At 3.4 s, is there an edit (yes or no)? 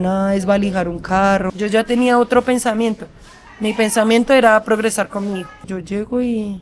no